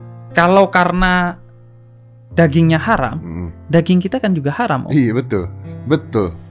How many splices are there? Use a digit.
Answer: 0